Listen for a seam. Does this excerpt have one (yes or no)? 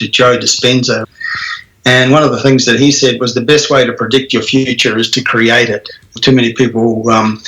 yes